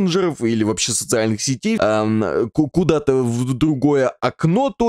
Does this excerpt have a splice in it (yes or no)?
yes